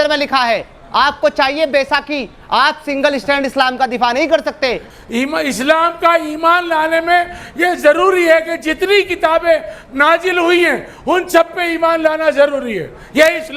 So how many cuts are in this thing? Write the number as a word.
one